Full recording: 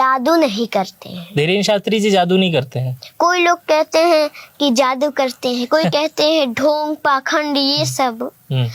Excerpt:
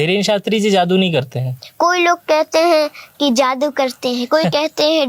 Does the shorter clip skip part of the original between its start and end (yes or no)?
no